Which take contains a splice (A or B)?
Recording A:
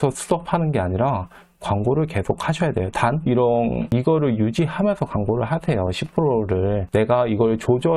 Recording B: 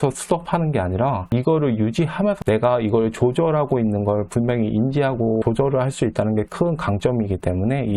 B